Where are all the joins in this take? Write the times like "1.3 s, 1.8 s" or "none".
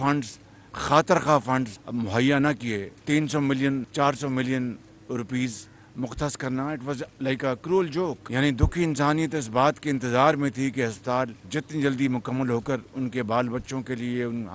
1.8 s, 2.9 s, 3.9 s, 8.2 s, 11.4 s

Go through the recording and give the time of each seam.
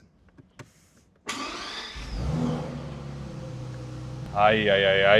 4.3 s

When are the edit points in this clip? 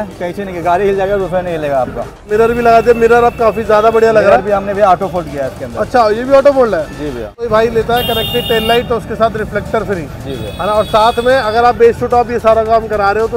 2.3 s, 7.5 s

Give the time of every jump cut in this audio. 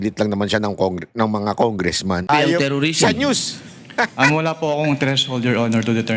2.3 s

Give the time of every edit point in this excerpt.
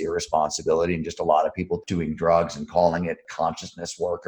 1.8 s, 3.2 s

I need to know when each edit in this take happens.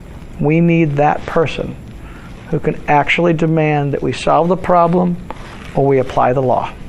none

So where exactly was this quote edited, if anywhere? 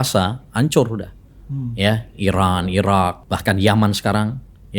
3.3 s

